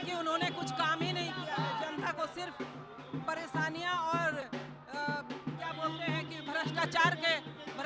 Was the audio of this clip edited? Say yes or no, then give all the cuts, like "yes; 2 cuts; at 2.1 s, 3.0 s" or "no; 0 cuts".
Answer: yes; 1 cut; at 4.5 s